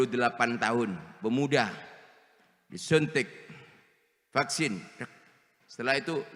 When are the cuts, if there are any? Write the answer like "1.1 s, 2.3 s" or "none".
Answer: none